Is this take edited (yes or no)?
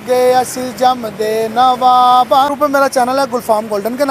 yes